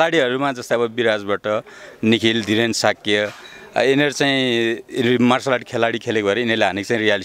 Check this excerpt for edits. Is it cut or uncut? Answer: uncut